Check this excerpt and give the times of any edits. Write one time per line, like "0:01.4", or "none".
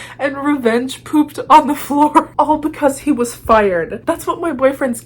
0:04.0